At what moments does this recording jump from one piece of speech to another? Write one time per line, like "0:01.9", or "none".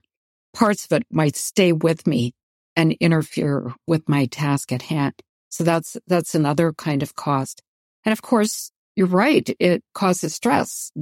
0:09.5